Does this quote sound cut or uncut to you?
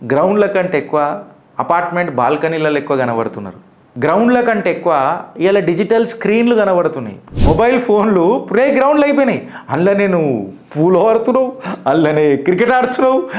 cut